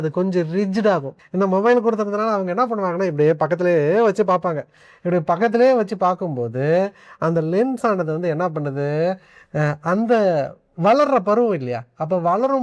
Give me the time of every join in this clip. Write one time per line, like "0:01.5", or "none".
0:01.2